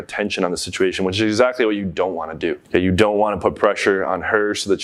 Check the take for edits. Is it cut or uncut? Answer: uncut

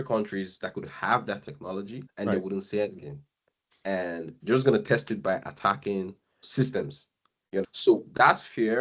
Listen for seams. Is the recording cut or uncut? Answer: cut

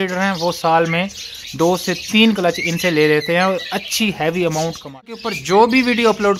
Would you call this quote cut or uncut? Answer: cut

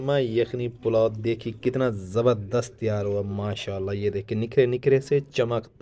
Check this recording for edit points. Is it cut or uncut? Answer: uncut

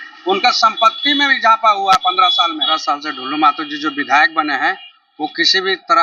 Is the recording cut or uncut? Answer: cut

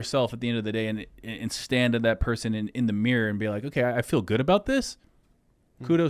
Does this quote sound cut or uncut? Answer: uncut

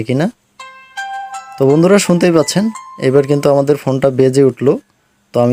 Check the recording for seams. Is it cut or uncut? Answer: uncut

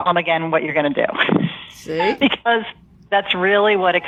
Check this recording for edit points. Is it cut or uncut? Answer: uncut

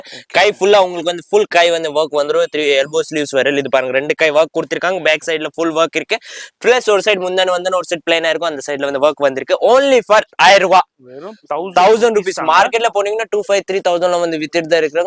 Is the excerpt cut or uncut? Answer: uncut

